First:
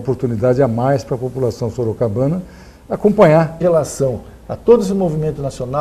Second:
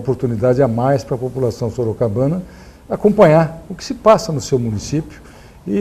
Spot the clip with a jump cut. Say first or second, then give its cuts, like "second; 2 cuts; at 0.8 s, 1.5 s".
second; 1 cut; at 3.5 s